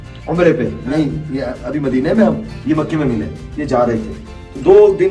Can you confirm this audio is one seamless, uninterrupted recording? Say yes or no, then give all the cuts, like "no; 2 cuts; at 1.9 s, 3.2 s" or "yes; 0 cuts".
yes; 0 cuts